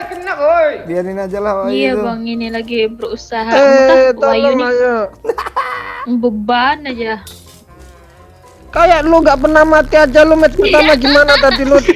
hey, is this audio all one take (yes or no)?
yes